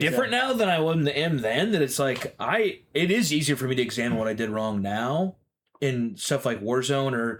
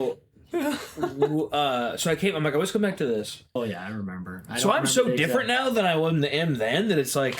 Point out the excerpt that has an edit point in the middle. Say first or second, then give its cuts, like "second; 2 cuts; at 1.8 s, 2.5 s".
second; 1 cut; at 3.5 s